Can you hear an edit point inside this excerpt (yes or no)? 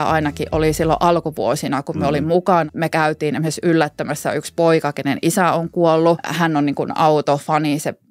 yes